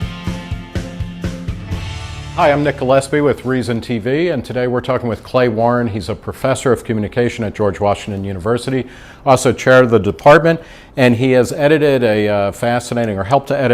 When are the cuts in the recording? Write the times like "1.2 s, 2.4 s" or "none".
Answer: 2.2 s, 8.6 s